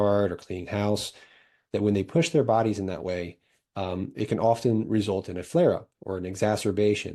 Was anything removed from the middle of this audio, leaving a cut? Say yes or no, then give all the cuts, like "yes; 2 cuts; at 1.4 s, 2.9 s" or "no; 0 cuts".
no; 0 cuts